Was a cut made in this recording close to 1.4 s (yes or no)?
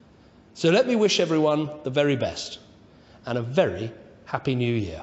yes